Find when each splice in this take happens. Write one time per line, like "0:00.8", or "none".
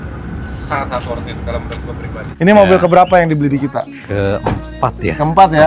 0:02.3
0:04.0